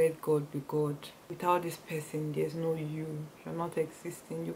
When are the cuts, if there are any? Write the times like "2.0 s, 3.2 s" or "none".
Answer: 1.2 s